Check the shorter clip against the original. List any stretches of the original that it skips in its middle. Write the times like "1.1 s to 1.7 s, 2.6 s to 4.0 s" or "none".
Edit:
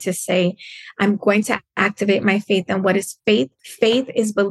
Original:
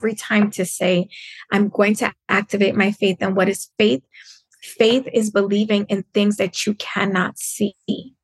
4.1 s to 4.6 s